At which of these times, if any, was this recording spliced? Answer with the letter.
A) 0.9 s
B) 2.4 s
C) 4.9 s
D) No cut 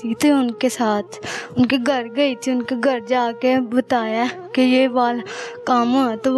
D